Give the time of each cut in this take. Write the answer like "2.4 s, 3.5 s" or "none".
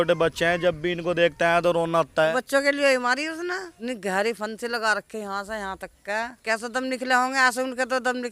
2.3 s, 3.7 s, 6.4 s